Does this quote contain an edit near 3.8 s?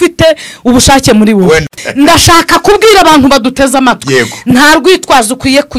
no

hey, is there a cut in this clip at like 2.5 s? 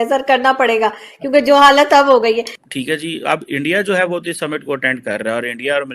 yes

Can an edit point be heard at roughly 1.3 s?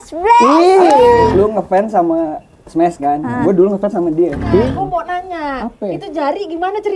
yes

